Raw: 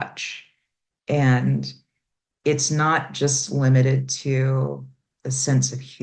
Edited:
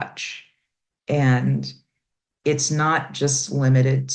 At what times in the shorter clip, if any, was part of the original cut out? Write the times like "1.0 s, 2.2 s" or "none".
none